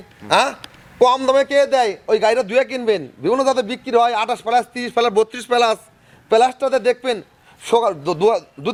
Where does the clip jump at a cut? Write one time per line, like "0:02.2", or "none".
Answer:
none